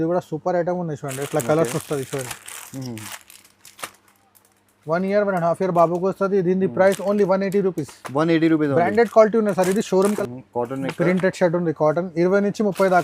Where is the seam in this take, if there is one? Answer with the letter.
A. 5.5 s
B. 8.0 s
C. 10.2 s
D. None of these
C